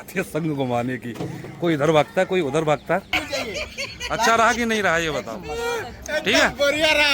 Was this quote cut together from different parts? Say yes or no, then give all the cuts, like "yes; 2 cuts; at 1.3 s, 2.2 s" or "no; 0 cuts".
yes; 1 cut; at 3.2 s